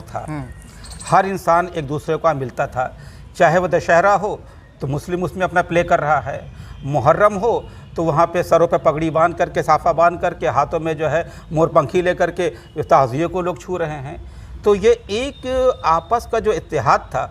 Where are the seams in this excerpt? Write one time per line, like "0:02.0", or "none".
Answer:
none

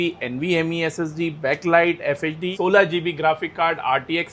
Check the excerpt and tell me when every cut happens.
0:02.5

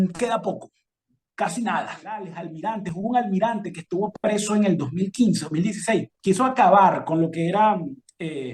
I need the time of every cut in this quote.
0:02.4
0:06.1

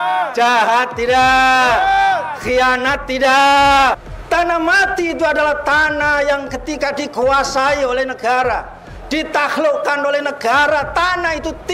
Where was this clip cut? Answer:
0:04.0

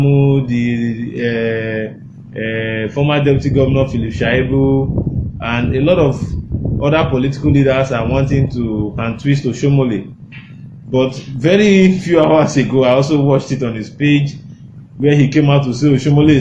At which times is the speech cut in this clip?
none

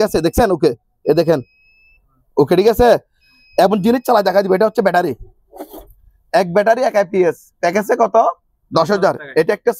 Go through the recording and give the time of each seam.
none

